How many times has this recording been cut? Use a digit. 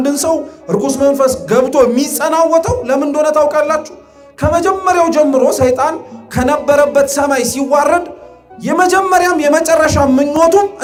0